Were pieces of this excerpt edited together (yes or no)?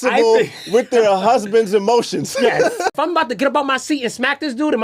yes